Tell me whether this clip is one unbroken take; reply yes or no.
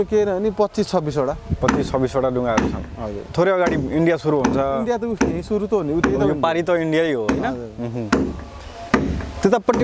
no